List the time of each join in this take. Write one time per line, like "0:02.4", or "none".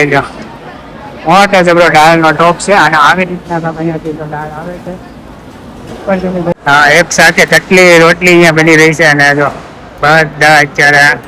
0:06.5